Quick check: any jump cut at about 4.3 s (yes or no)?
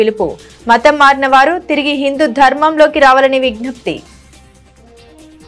yes